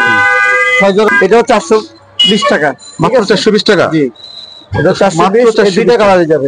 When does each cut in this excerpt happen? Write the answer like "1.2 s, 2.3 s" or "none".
1.1 s